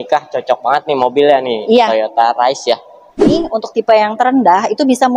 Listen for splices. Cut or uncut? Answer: cut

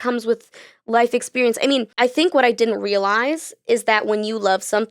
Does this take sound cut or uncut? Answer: cut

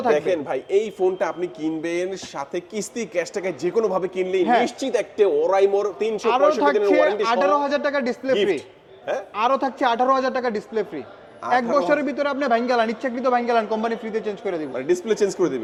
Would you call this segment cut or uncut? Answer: uncut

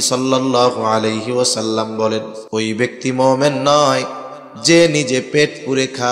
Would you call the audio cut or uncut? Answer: cut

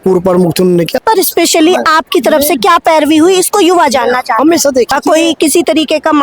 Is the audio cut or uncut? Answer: cut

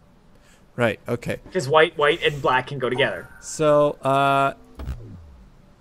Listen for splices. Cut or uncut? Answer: cut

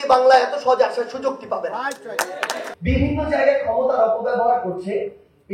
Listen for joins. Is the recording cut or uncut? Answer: cut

